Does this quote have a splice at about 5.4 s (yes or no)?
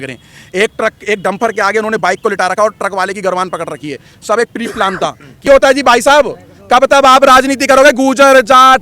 yes